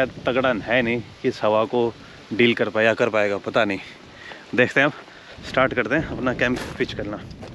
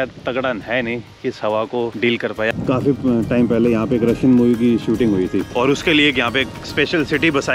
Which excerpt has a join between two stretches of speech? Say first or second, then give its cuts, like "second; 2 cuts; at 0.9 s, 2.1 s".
second; 2 cuts; at 2.2 s, 5.5 s